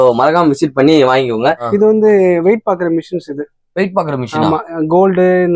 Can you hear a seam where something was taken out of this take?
yes; 1 cut; at 1.7 s

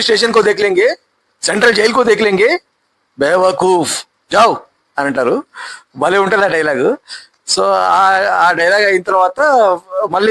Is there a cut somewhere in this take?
no; 0 cuts

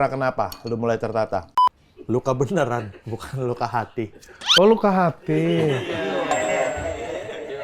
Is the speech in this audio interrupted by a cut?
yes; 1 cut; at 1.6 s

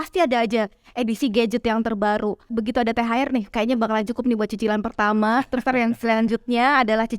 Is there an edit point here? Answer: yes; 1 cut; at 2.5 s

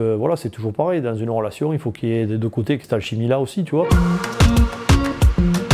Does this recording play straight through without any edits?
no; 2 cuts; at 2.8 s, 3.9 s

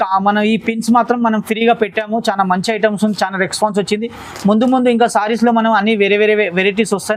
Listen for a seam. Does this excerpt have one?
no; 0 cuts

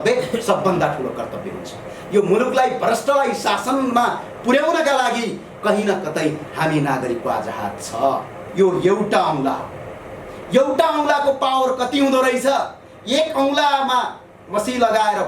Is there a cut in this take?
yes; 1 cut; at 8.4 s

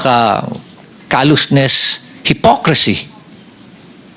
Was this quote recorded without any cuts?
yes; 0 cuts

